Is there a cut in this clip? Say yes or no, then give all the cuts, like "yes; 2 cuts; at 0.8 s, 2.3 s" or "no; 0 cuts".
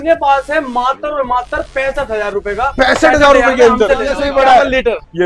yes; 1 cut; at 4.2 s